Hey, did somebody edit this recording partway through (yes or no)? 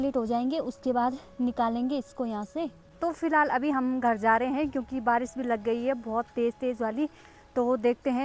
no